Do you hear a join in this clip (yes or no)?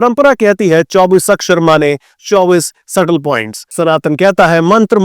yes